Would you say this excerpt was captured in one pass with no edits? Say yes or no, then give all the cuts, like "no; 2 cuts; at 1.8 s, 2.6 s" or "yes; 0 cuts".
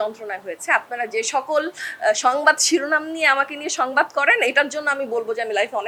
yes; 0 cuts